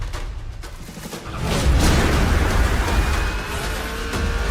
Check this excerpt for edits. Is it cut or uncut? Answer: uncut